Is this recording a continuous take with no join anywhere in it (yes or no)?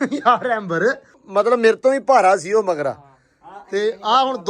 no